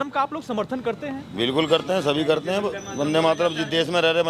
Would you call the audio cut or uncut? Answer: uncut